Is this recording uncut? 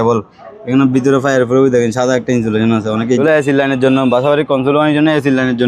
no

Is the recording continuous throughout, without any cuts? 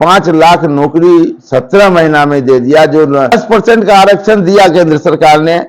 no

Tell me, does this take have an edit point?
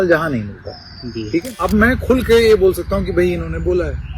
yes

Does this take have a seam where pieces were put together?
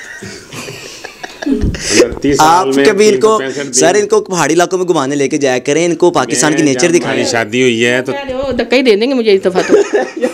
no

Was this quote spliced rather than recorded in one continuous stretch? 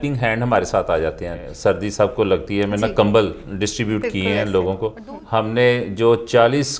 yes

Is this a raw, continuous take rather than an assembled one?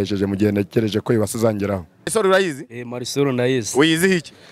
no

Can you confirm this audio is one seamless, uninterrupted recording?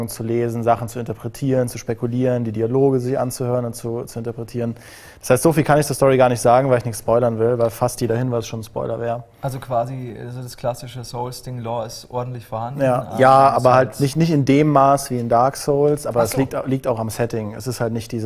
no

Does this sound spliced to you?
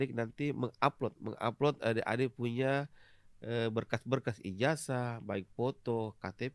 no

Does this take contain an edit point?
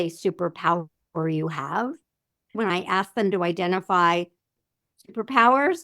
yes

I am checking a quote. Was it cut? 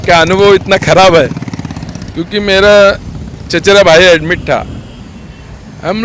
no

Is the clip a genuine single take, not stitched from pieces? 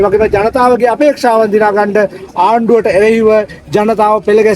yes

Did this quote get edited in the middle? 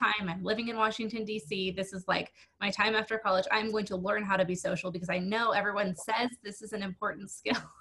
no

